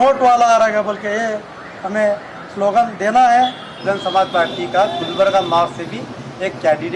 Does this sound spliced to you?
yes; 1 cut; at 3.8 s

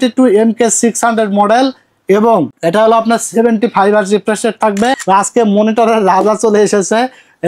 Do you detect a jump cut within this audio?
yes; 2 cuts; at 2.5 s, 5.0 s

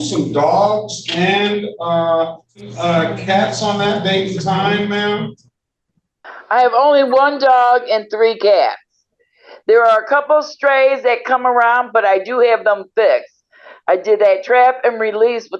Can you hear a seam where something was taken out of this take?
yes; 1 cut; at 2.7 s

